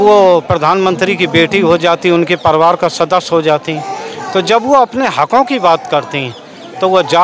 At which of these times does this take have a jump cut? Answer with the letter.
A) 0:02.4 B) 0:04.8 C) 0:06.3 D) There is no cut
D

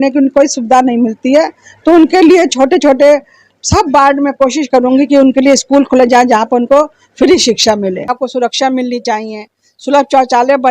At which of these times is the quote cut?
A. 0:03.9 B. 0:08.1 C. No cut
B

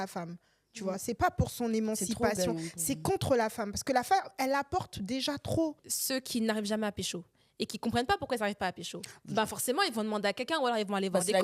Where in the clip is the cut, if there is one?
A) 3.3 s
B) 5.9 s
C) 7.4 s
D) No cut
B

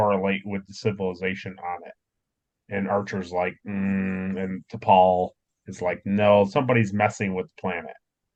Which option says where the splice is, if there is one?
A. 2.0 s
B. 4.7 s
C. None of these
C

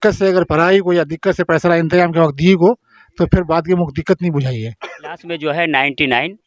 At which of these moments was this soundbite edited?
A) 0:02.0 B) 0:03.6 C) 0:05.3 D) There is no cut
C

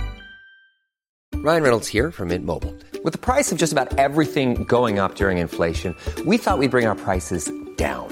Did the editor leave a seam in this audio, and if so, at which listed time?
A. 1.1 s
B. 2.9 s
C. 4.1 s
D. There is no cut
A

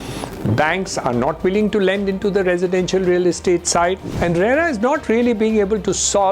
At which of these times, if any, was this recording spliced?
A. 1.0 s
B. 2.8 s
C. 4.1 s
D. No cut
C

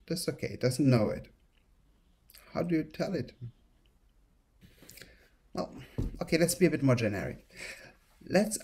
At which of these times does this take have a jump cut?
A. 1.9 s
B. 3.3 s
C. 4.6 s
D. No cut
C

